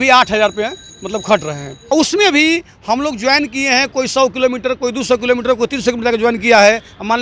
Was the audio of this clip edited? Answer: yes; 1 cut; at 1.8 s

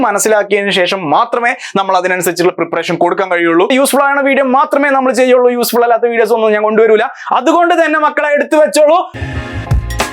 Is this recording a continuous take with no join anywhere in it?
no; 2 cuts; at 3.7 s, 9.1 s

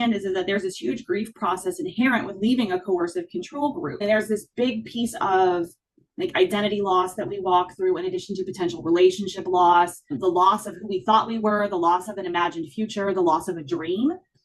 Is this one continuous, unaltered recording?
yes; 0 cuts

